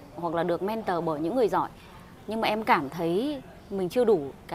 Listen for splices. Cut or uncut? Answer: uncut